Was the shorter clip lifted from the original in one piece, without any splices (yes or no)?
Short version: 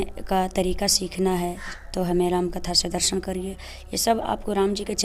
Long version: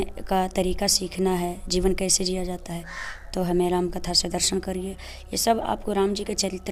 no